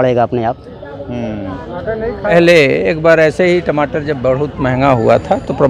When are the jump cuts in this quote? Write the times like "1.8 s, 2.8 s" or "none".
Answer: 2.2 s

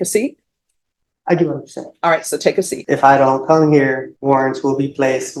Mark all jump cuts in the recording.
2.8 s, 4.1 s

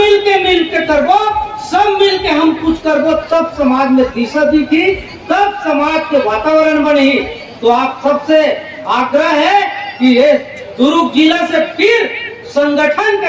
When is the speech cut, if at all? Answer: none

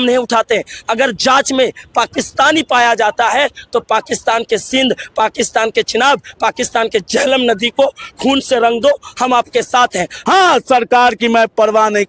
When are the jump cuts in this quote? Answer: 10.1 s

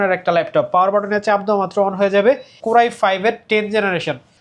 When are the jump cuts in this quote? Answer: 2.6 s

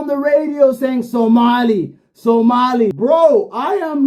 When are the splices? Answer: 2.9 s

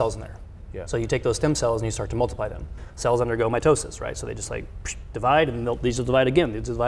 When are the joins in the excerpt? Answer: 2.8 s

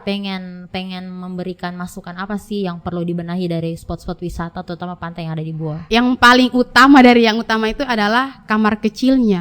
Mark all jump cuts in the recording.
5.9 s

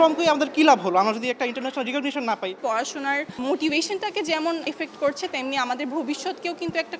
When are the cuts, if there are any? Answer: 2.6 s, 4.6 s

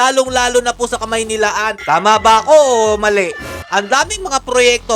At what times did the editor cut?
1.8 s, 3.6 s

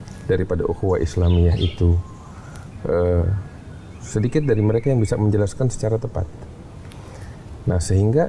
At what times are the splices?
none

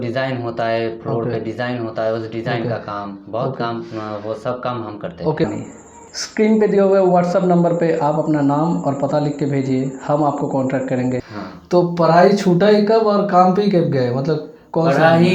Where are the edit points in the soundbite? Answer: 5.5 s, 11.3 s

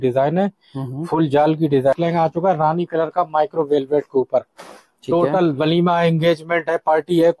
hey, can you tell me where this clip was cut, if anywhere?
1.9 s

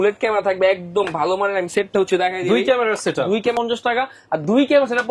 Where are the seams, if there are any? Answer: 3.6 s

